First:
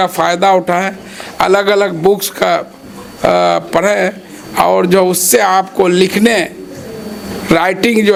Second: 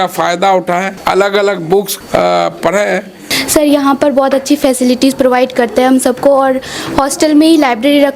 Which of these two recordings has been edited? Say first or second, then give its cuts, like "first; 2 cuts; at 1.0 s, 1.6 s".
second; 3 cuts; at 0.9 s, 1.9 s, 3.3 s